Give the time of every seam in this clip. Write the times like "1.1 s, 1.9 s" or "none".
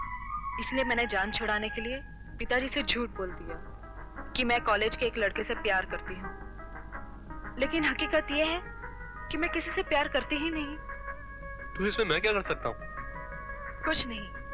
none